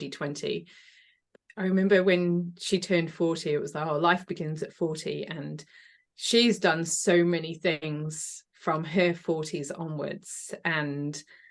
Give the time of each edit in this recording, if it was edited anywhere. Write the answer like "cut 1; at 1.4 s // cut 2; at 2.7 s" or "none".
cut 1; at 1.2 s

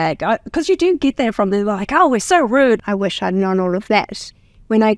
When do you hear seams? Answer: cut 1; at 2.8 s

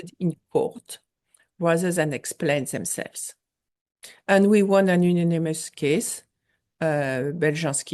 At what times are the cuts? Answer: none

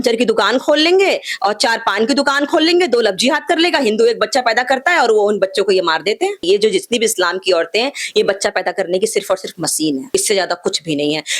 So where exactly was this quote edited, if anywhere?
cut 1; at 6.4 s

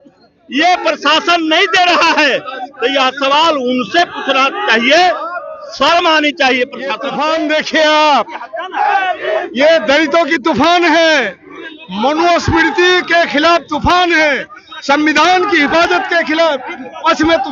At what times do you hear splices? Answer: cut 1; at 7.1 s

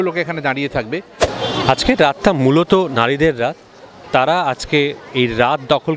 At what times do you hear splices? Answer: cut 1; at 1.3 s

